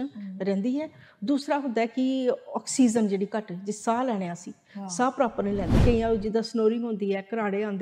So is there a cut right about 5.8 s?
yes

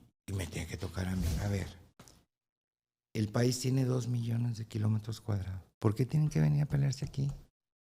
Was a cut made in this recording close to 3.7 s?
no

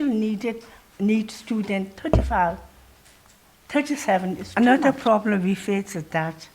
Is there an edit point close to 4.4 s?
yes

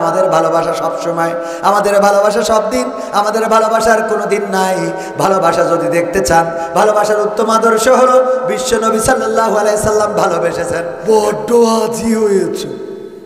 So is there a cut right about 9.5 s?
no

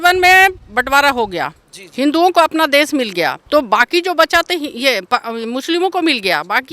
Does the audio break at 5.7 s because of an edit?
no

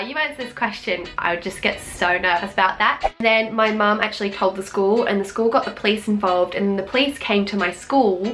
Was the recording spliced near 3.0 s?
yes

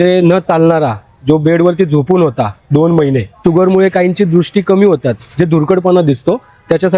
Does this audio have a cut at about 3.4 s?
yes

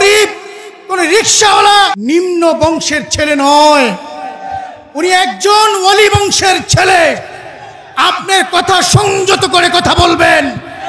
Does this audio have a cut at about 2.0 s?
yes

